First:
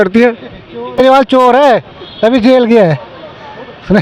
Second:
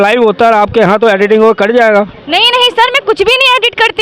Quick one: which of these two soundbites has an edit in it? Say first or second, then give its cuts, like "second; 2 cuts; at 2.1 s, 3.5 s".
first; 1 cut; at 1.0 s